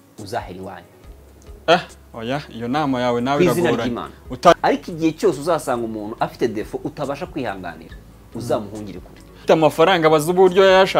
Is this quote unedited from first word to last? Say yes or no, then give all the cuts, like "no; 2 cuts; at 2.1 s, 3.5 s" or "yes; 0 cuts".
no; 2 cuts; at 4.5 s, 9.3 s